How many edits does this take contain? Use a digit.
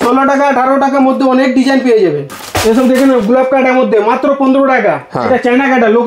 1